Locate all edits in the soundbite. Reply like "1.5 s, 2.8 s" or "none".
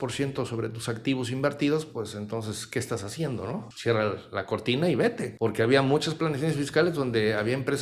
3.7 s, 5.3 s